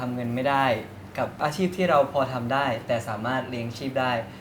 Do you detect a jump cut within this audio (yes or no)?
no